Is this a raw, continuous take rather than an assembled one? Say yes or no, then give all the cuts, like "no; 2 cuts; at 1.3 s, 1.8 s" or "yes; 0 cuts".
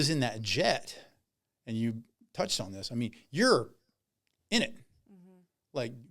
yes; 0 cuts